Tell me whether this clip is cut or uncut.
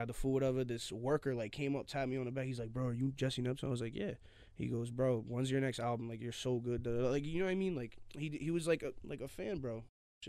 uncut